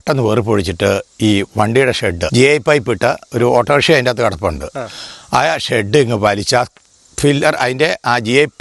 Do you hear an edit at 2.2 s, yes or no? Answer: yes